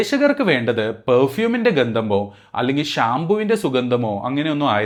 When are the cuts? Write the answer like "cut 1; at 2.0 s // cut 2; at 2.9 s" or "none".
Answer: none